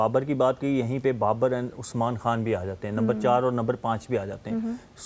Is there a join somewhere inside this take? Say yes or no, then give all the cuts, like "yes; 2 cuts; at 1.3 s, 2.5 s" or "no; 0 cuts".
no; 0 cuts